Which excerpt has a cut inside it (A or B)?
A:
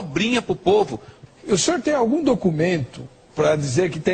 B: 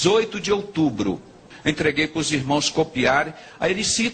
B